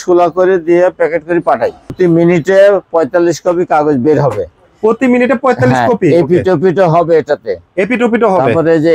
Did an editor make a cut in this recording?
yes; 1 cut; at 1.9 s

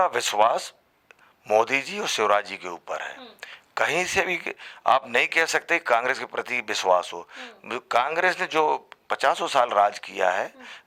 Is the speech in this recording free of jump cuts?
yes; 0 cuts

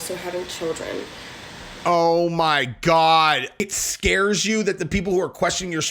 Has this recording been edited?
yes; 1 cut; at 3.7 s

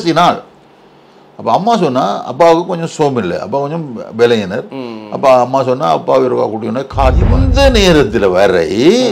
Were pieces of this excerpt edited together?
yes; 1 cut; at 7.4 s

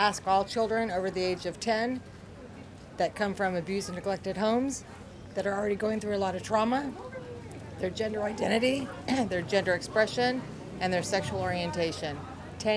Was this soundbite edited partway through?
no; 0 cuts

